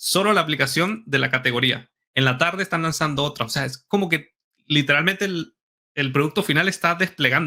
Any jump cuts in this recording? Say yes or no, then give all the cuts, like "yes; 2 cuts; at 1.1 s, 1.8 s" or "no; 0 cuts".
no; 0 cuts